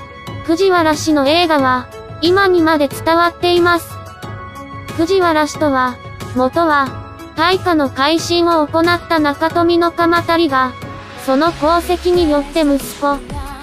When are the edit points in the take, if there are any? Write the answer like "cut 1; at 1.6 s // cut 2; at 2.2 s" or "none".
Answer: cut 1; at 10.3 s